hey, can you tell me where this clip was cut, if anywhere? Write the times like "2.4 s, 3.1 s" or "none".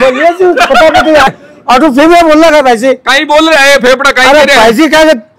1.3 s